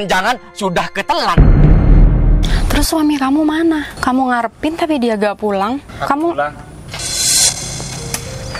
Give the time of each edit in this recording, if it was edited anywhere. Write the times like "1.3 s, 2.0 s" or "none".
1.3 s, 2.4 s, 3.9 s, 5.9 s